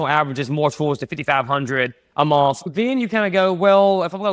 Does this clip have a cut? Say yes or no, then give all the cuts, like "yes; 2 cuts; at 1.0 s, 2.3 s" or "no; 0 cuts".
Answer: yes; 1 cut; at 2.7 s